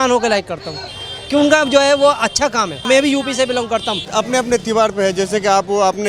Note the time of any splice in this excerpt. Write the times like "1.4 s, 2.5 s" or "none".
2.8 s, 4.0 s